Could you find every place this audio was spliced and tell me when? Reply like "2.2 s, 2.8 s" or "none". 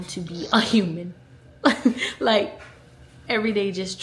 none